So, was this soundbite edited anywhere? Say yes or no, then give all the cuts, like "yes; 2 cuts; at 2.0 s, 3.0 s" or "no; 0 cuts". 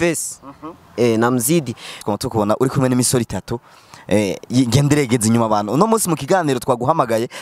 yes; 1 cut; at 2.1 s